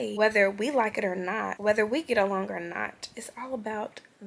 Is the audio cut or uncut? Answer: cut